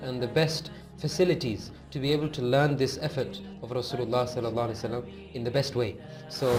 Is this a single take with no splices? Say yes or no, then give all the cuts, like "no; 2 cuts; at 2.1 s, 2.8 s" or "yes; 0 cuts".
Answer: yes; 0 cuts